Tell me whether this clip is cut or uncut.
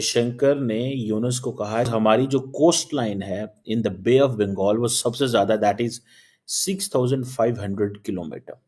cut